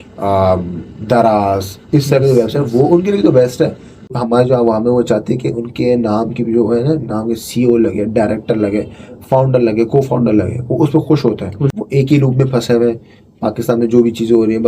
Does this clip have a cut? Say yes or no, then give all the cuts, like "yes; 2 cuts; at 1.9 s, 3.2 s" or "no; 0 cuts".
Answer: yes; 2 cuts; at 4.1 s, 11.8 s